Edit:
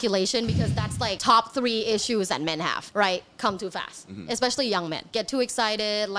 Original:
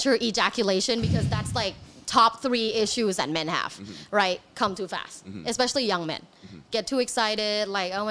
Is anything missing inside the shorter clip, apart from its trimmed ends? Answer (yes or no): yes